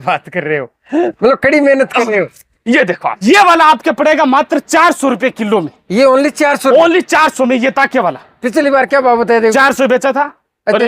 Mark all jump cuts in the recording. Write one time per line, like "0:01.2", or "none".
0:03.2